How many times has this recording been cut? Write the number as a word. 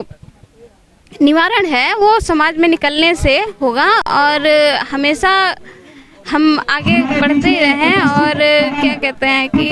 zero